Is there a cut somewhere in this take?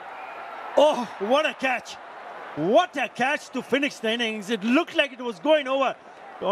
no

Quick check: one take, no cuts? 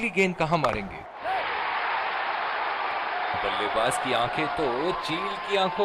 no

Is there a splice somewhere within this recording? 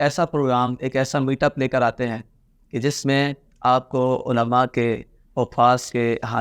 no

